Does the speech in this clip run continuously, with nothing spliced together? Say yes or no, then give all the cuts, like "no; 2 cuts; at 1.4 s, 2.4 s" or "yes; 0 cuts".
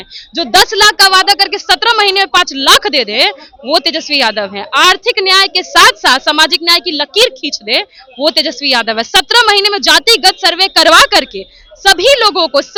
yes; 0 cuts